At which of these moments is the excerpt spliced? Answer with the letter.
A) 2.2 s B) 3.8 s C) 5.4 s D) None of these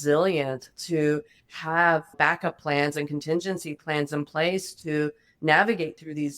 A